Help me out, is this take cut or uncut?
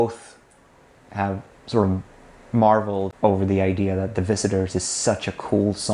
cut